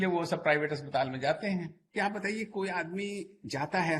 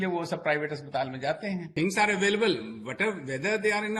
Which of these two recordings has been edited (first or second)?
first